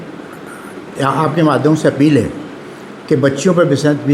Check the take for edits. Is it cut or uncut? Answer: uncut